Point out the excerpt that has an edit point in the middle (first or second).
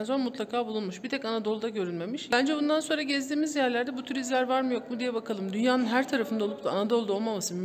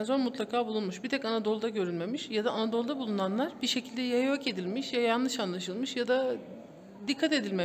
first